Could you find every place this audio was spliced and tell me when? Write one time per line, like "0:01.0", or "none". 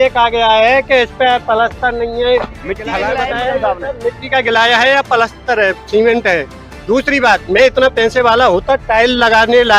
0:03.0

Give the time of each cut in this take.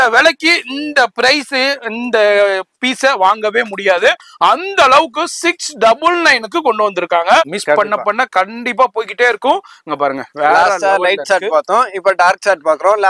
0:07.6

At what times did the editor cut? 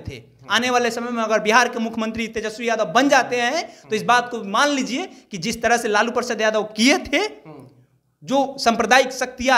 none

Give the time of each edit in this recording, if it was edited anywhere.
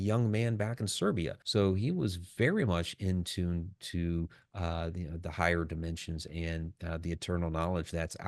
none

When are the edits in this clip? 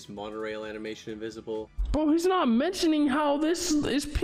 0:01.8

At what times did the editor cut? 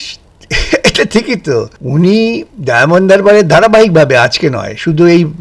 0:01.8

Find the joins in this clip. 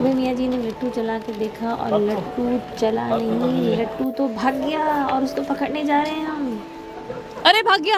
none

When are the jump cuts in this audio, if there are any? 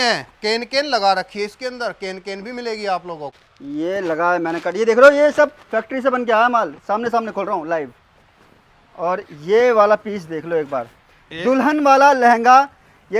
0:03.3

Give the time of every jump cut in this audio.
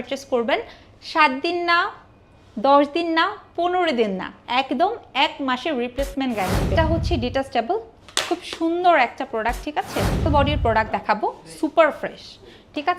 0:06.7
0:10.3

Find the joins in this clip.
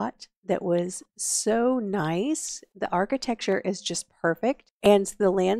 0:02.9
0:04.7

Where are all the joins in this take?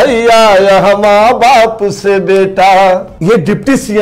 0:03.1

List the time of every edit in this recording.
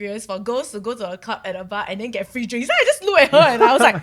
none

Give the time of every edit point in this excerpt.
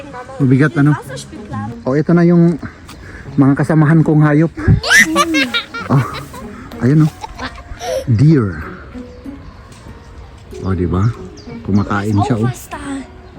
0:01.7

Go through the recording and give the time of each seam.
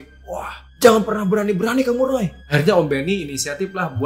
0:02.4

